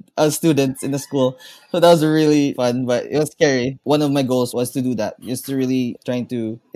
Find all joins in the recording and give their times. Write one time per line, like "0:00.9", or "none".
0:02.6
0:03.7
0:04.5
0:06.0